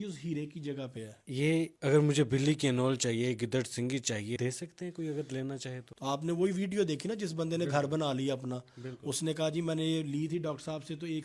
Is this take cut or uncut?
cut